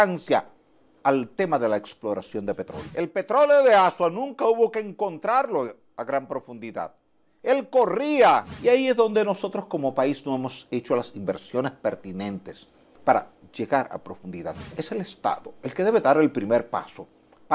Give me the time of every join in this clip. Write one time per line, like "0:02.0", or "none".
0:02.8
0:08.5
0:14.8